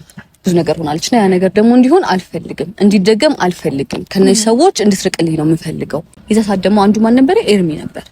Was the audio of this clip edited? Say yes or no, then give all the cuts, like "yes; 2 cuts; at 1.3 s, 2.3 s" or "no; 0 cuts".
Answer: yes; 1 cut; at 6.2 s